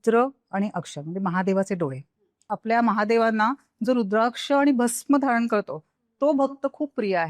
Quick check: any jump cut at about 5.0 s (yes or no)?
no